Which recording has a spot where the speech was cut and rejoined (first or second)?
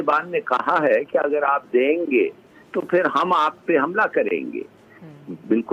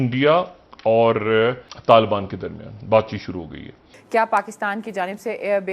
second